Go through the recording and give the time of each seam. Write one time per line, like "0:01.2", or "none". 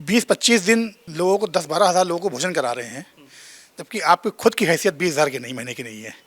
0:01.0